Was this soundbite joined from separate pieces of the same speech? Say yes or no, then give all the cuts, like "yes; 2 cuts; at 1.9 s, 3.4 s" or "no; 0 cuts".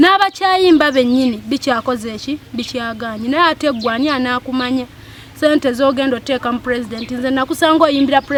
no; 0 cuts